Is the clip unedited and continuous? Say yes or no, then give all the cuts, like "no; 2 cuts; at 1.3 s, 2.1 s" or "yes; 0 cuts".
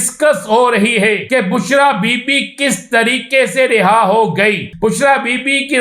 no; 2 cuts; at 1.2 s, 4.7 s